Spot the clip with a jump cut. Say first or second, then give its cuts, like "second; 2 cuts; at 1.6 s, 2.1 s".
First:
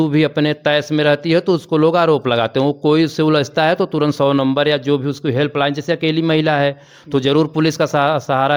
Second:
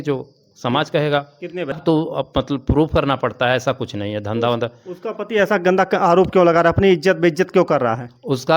second; 1 cut; at 1.8 s